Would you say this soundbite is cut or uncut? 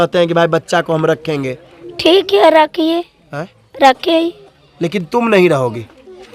uncut